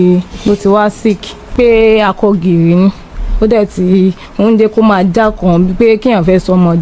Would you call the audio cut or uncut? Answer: cut